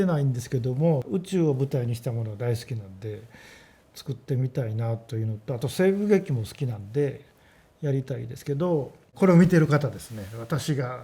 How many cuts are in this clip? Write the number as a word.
two